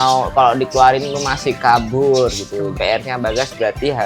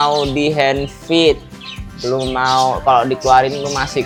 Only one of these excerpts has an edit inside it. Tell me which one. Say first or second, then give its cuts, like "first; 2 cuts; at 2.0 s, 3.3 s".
first; 1 cut; at 2.7 s